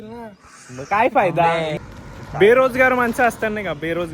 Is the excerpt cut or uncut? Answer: cut